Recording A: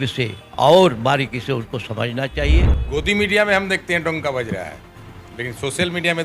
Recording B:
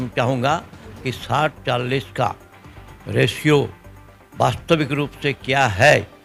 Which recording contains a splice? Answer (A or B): A